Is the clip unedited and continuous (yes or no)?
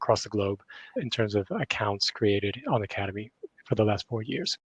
no